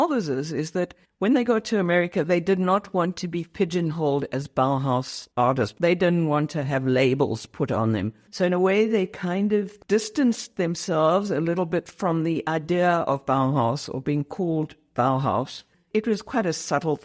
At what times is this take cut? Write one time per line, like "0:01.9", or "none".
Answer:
0:01.0